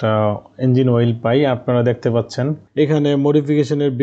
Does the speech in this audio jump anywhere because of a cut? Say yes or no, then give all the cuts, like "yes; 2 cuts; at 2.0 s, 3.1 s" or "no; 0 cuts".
yes; 1 cut; at 2.6 s